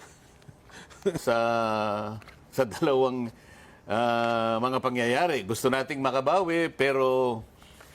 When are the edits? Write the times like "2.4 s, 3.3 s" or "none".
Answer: 1.2 s